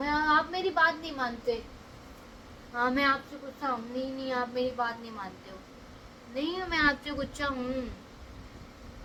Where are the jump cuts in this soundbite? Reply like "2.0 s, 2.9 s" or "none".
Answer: none